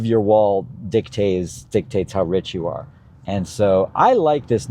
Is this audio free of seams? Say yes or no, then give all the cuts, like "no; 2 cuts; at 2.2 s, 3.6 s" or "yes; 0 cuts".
yes; 0 cuts